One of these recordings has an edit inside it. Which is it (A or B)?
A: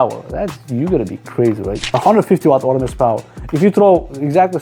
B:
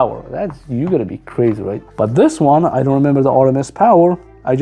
A